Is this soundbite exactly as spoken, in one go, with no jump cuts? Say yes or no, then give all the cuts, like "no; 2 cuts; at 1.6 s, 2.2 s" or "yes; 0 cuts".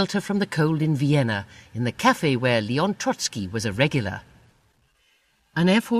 yes; 0 cuts